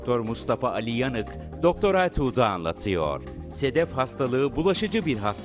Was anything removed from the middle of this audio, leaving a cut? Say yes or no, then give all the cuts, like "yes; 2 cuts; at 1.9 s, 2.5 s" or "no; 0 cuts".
yes; 1 cut; at 3.4 s